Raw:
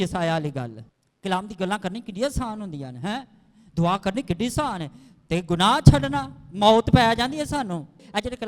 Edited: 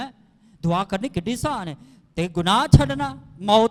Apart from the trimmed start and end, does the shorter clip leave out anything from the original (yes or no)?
no